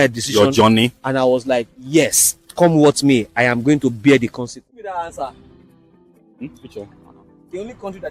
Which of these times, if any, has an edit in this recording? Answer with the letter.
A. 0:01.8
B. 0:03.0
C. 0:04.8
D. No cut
C